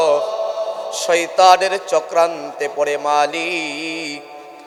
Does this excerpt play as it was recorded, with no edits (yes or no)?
yes